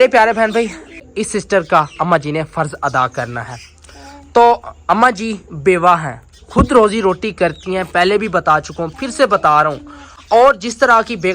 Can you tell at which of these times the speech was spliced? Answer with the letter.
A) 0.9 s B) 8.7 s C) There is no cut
A